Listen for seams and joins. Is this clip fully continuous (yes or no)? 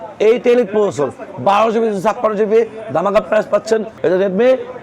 no